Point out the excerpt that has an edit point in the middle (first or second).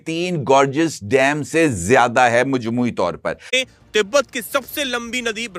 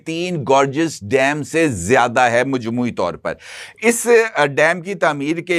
first